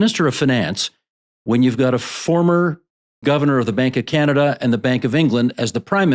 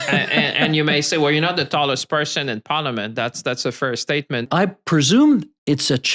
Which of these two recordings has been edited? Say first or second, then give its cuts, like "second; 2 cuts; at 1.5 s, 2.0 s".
second; 1 cut; at 4.5 s